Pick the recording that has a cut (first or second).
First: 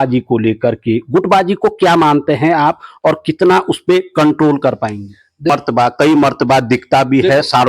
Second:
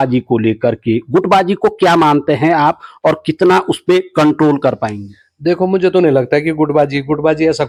first